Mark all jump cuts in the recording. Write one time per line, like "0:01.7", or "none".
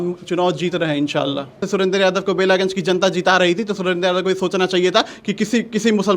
0:01.6

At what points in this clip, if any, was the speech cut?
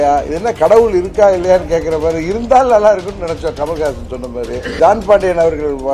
0:04.8

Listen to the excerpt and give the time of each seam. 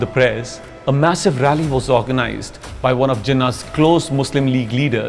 none

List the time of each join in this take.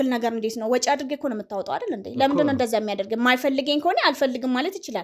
none

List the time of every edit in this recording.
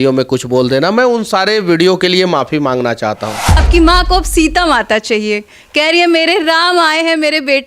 0:03.6

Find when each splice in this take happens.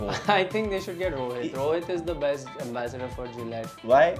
none

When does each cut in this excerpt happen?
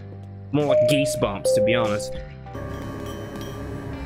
0:02.6

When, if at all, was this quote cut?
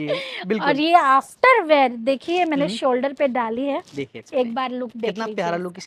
none

